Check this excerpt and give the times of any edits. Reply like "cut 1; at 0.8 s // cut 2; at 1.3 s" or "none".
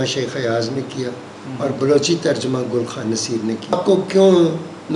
cut 1; at 3.8 s